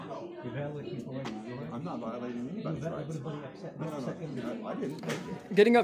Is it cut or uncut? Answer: uncut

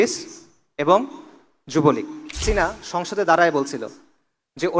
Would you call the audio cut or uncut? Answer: cut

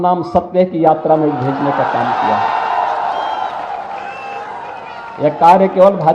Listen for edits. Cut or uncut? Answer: uncut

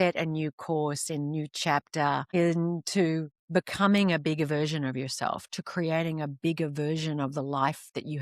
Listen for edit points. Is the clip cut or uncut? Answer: cut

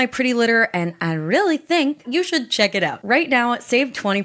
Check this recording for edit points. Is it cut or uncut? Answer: cut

